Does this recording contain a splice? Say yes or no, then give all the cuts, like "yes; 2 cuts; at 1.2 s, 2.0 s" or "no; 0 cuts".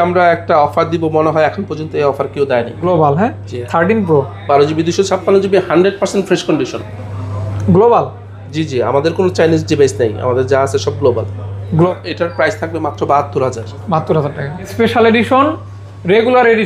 yes; 4 cuts; at 2.8 s, 6.8 s, 11.9 s, 14.7 s